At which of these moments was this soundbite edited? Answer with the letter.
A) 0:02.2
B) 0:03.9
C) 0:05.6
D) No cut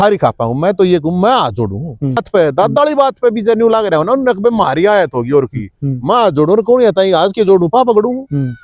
A